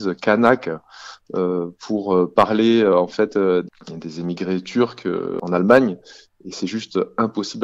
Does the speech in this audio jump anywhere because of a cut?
yes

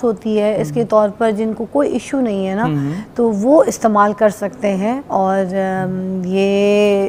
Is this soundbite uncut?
yes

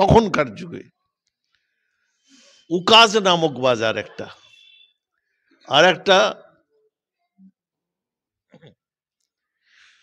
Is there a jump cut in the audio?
yes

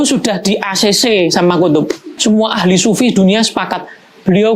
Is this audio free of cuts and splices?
no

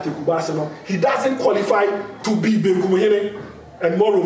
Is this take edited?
no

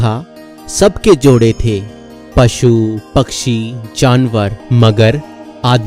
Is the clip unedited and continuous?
no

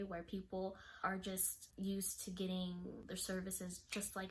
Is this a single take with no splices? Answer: no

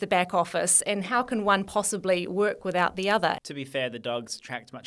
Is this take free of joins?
no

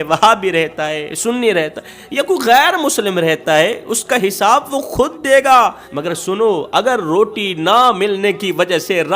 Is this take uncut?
no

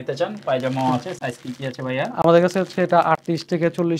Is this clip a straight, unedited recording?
yes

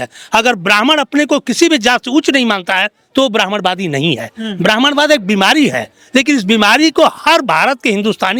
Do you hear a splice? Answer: no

